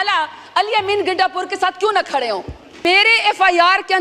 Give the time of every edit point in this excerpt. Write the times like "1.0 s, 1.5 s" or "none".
2.8 s